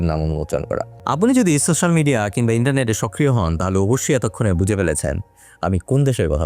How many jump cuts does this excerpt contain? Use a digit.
1